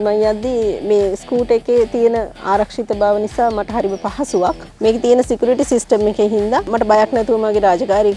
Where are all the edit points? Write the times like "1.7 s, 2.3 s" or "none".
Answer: 4.7 s